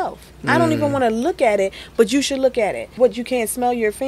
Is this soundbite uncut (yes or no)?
no